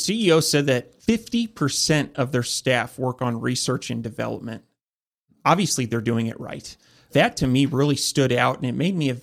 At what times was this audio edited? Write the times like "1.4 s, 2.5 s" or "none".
0.9 s, 7.1 s

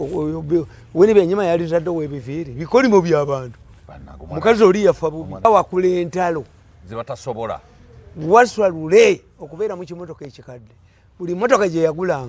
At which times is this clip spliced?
5.4 s

